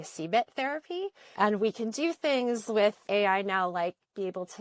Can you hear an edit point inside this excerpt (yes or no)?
yes